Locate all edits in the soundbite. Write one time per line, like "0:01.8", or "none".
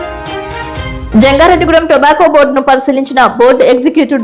0:01.0